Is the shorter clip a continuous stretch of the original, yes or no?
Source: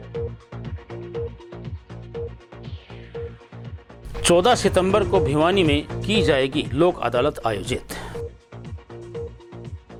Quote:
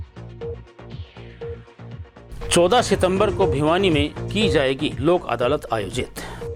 yes